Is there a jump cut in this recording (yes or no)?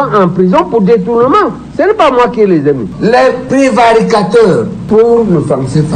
yes